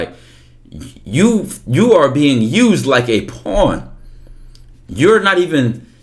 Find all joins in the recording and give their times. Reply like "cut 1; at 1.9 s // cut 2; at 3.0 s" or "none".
none

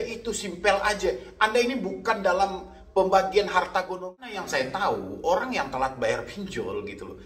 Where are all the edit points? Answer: cut 1; at 3.9 s

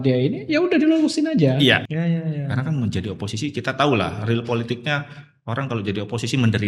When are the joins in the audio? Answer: cut 1; at 1.9 s

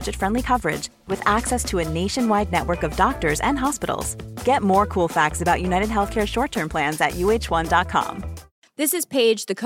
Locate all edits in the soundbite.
cut 1; at 8.5 s

